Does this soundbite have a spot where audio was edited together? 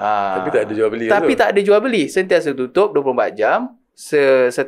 no; 0 cuts

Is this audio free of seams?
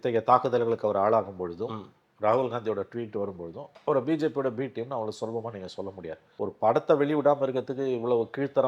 no; 1 cut; at 6.2 s

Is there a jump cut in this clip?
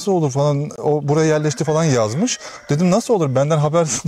no; 0 cuts

